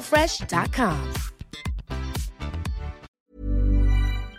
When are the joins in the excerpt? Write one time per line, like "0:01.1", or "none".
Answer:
0:03.1